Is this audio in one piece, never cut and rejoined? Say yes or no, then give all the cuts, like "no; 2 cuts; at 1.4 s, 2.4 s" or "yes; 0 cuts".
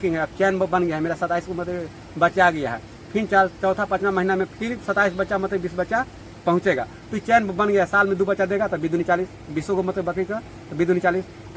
yes; 0 cuts